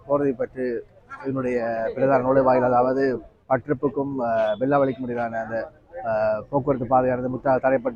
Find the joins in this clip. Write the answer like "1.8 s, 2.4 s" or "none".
none